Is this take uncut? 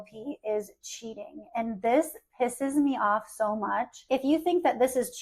no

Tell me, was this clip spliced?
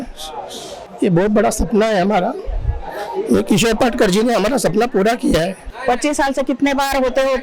yes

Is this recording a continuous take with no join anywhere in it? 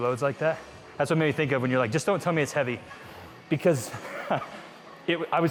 yes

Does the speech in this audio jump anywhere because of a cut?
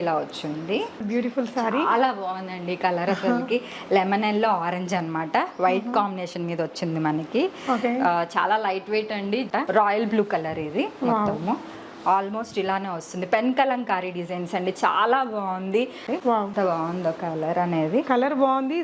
yes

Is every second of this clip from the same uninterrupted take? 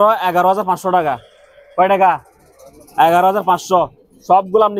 yes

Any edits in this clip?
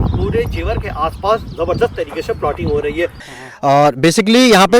yes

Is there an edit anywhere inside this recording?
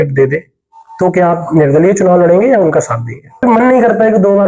yes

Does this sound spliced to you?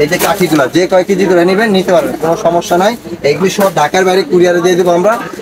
no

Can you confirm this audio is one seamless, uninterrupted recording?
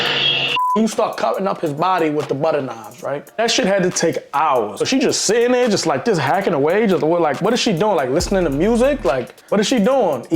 no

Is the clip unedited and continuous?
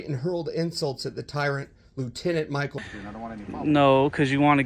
no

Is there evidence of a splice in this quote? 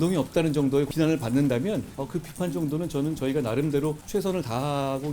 yes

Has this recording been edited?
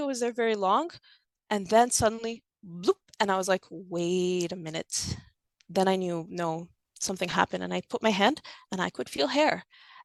no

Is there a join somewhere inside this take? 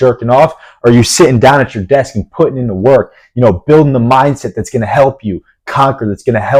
no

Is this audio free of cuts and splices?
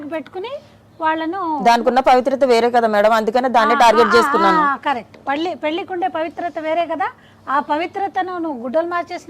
yes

